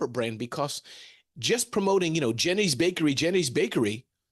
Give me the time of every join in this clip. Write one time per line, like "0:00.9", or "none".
none